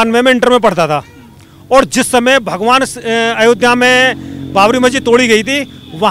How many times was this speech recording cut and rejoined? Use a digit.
0